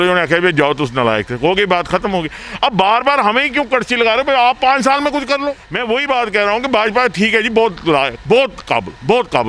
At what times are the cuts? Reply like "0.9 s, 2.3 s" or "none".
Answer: 5.7 s

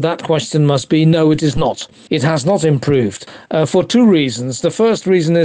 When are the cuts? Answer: none

